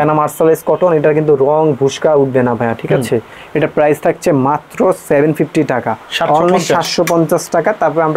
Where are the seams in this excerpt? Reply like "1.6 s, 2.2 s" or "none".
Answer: none